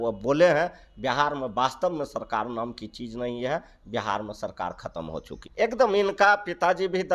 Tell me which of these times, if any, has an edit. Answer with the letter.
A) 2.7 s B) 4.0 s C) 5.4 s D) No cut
C